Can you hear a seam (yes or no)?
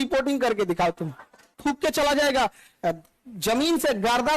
yes